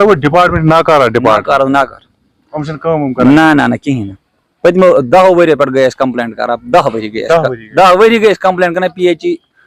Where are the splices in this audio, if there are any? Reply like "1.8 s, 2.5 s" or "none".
none